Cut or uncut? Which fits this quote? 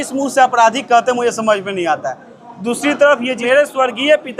cut